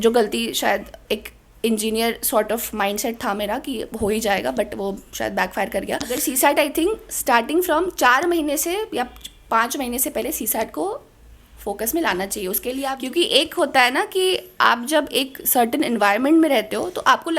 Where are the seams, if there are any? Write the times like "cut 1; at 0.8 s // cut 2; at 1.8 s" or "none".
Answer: cut 1; at 6.2 s // cut 2; at 13.0 s